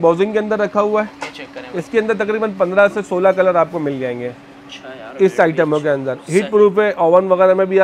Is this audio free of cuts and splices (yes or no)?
yes